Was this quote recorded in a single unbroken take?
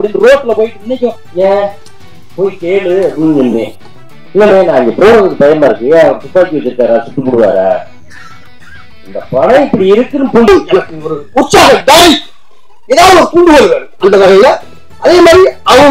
no; 2 cuts; at 1.2 s, 10.5 s

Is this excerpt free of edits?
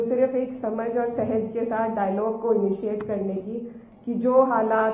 no; 1 cut; at 3.8 s

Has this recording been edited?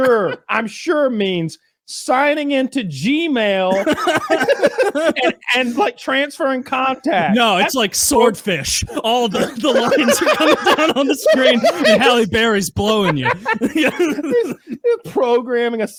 no; 0 cuts

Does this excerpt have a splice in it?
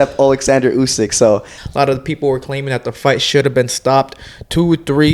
yes; 1 cut; at 1.6 s

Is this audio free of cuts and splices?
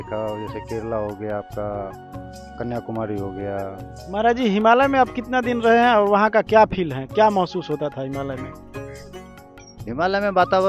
no; 2 cuts; at 8.5 s, 9.8 s

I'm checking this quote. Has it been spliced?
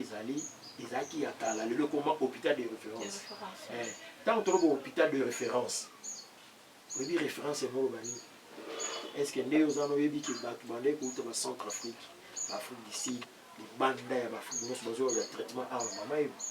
yes; 1 cut; at 3.4 s

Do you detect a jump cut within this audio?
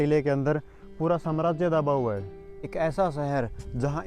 yes; 1 cut; at 2.7 s

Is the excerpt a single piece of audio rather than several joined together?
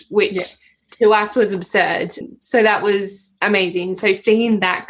no; 1 cut; at 2.2 s

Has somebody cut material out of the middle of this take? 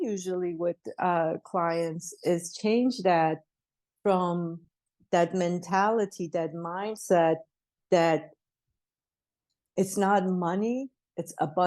no; 0 cuts

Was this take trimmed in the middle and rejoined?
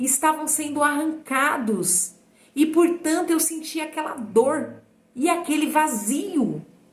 no; 0 cuts

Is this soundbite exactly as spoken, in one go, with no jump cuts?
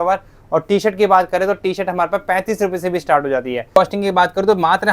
no; 1 cut; at 3.8 s

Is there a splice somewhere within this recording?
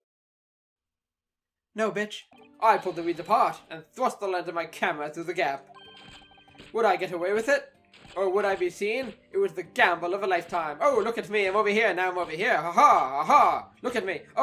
yes; 1 cut; at 2.3 s

